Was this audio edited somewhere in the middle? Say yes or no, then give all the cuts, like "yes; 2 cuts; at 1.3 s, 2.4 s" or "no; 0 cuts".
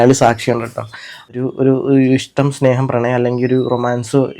yes; 1 cut; at 1.3 s